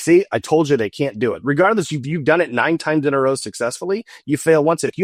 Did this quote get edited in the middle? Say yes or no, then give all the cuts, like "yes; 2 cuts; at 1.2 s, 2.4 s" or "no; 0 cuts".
no; 0 cuts